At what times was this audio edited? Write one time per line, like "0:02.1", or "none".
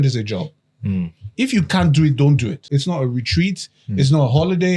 0:02.7